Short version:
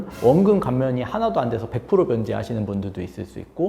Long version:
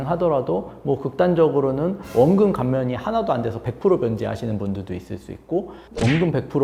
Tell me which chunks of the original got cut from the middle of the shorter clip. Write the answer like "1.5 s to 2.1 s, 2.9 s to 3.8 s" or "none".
none